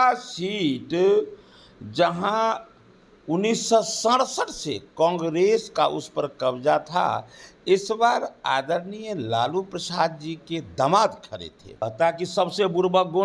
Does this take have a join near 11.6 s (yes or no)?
yes